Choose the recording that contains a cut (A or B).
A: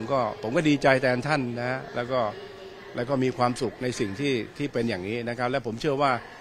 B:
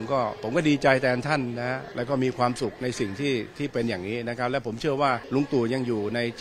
B